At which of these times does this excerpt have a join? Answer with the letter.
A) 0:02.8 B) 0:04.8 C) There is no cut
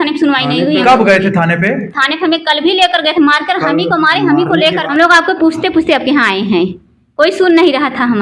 B